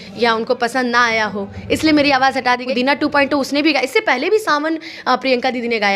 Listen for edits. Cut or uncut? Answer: cut